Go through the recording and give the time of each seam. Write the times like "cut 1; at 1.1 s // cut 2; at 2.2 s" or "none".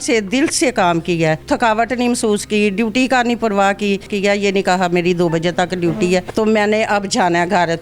cut 1; at 1.4 s // cut 2; at 4.1 s // cut 3; at 6.3 s